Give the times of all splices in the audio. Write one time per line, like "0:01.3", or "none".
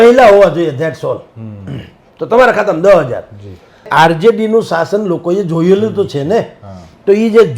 0:03.9